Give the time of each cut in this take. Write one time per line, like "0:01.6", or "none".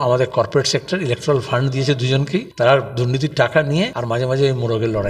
0:02.5
0:04.0